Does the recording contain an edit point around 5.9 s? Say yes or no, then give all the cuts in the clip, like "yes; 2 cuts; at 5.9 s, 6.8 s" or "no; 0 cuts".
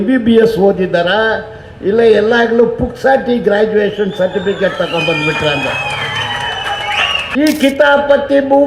no; 1 cut; at 7.3 s